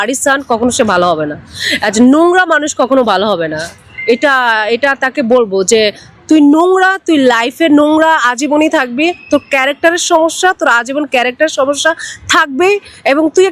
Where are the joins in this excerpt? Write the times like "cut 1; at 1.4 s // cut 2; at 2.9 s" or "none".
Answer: none

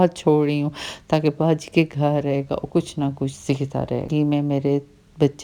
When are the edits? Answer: cut 1; at 4.1 s

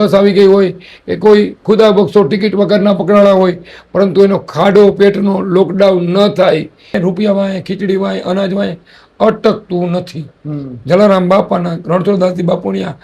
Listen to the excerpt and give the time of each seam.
cut 1; at 6.9 s

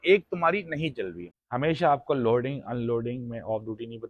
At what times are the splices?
cut 1; at 1.3 s

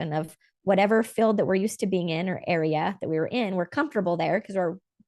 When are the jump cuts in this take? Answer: none

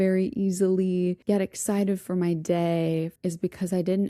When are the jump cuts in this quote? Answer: cut 1; at 1.2 s // cut 2; at 3.1 s

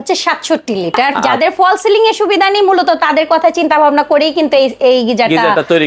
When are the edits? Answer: cut 1; at 1.3 s

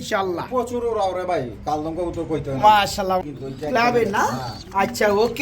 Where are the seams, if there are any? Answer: cut 1; at 3.2 s

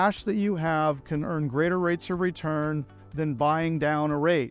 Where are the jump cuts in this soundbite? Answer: none

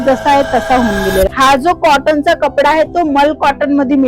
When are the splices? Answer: cut 1; at 1.3 s

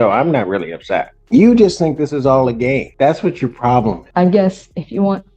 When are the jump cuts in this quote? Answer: cut 1; at 1.1 s // cut 2; at 2.9 s // cut 3; at 4.0 s

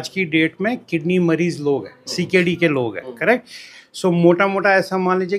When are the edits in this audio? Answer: none

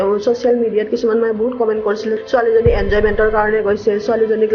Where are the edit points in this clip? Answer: cut 1; at 2.1 s

